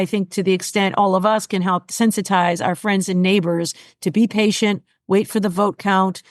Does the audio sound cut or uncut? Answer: cut